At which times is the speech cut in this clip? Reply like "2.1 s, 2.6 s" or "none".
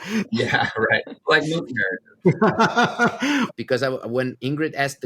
1.1 s, 3.5 s